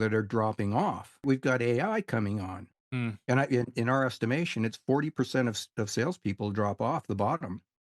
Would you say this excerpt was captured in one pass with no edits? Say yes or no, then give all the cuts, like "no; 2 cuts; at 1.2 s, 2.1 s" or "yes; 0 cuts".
no; 2 cuts; at 1.2 s, 2.6 s